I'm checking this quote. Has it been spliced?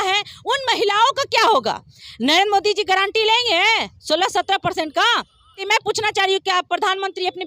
yes; 1 cut; at 5.6 s

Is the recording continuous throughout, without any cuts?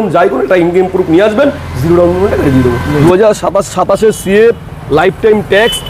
no; 1 cut; at 3.0 s

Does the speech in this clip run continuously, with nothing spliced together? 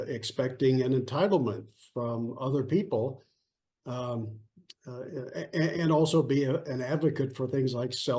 yes; 0 cuts

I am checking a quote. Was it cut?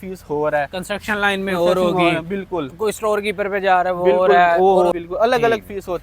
no; 0 cuts

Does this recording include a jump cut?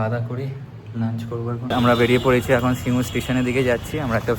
yes; 1 cut; at 1.6 s

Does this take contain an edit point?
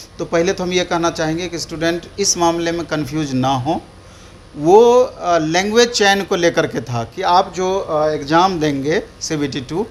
no; 0 cuts

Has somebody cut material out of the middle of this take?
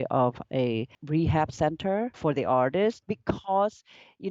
yes; 3 cuts; at 1.0 s, 2.2 s, 3.0 s

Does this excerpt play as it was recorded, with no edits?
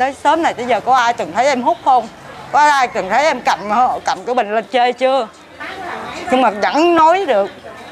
yes; 0 cuts

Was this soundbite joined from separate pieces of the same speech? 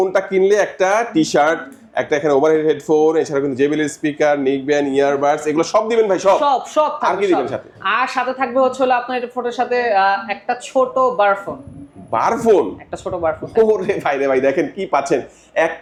no; 0 cuts

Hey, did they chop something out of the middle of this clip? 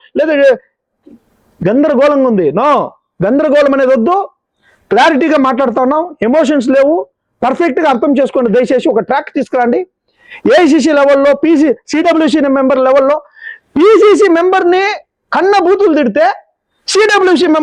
no; 0 cuts

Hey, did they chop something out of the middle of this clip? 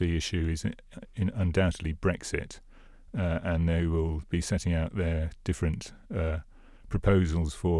no; 0 cuts

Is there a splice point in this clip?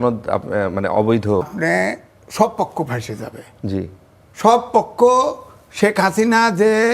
yes; 1 cut; at 1.5 s

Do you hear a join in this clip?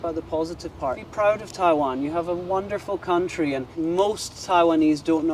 yes; 2 cuts; at 1.1 s, 3.7 s

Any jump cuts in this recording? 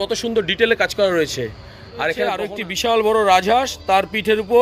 yes; 1 cut; at 2.4 s

